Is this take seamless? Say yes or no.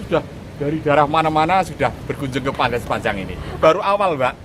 no